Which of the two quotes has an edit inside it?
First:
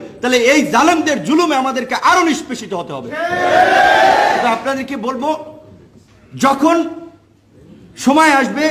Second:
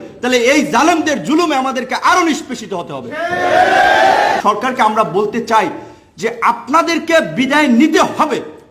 second; 1 cut; at 4.4 s

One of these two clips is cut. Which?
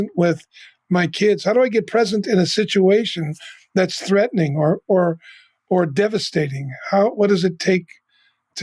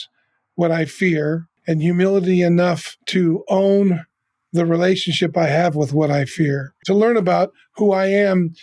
second; 3 cuts; at 1.5 s, 2.9 s, 6.8 s

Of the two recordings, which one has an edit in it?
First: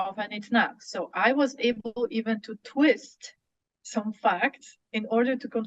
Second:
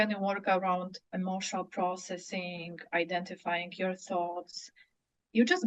second; 1 cut; at 1.0 s

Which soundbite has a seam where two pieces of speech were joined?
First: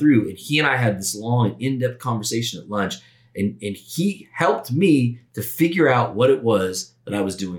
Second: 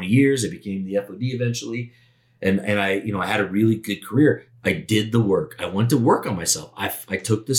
second; 1 cut; at 4.5 s

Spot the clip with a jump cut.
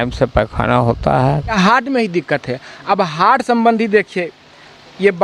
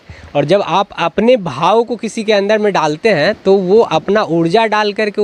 first; 1 cut; at 1.5 s

